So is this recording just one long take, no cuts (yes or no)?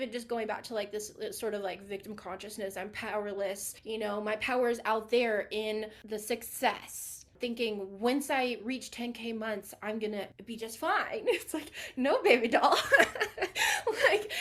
no